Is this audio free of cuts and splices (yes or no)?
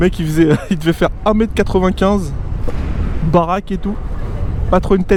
yes